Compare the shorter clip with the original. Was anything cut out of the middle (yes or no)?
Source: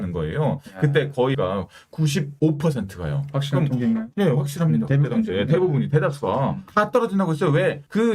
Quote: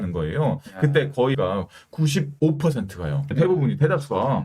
yes